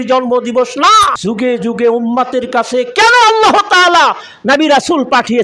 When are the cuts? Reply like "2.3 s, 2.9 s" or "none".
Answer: 1.2 s